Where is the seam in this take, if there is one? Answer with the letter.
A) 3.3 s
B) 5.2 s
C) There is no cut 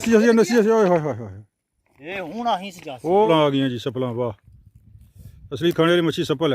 A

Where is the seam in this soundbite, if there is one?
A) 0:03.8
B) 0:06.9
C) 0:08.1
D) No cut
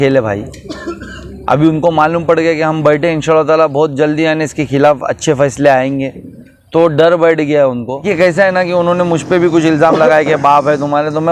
C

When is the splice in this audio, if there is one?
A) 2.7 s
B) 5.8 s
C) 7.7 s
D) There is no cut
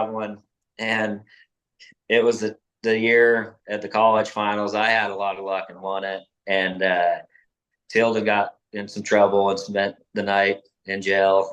D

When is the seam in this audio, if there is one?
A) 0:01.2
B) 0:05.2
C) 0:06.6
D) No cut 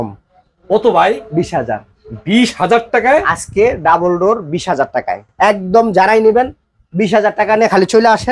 B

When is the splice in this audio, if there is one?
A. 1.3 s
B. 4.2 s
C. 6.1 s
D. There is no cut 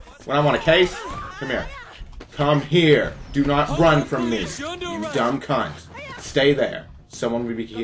A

